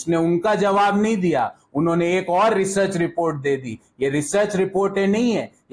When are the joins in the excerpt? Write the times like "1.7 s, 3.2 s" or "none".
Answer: none